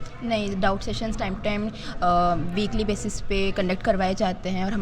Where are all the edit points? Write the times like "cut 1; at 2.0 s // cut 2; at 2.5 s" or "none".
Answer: none